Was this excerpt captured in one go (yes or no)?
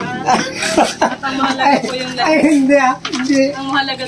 yes